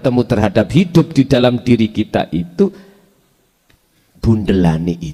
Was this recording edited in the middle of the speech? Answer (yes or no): no